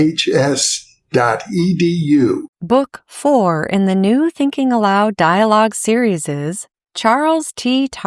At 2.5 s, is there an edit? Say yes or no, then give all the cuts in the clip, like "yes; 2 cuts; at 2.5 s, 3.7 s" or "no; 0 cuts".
yes; 1 cut; at 2.5 s